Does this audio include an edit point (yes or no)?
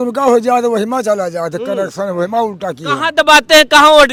no